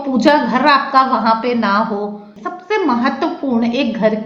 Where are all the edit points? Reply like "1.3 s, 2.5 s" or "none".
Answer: 2.3 s